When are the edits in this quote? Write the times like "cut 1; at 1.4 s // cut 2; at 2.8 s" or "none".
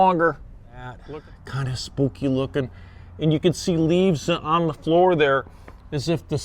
cut 1; at 1.0 s